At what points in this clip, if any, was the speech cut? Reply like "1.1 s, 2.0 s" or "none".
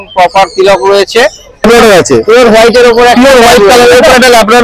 1.6 s